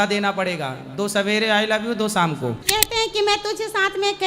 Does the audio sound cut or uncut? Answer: cut